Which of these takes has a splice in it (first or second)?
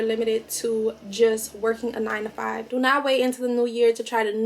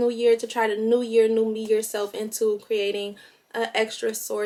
first